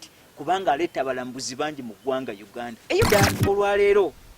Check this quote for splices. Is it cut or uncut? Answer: cut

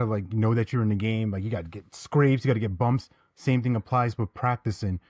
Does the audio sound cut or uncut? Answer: uncut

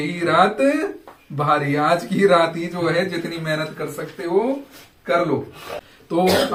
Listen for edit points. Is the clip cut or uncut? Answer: uncut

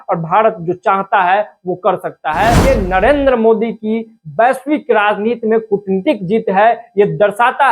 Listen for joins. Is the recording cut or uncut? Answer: cut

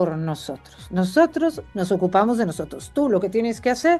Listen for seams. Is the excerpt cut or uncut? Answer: uncut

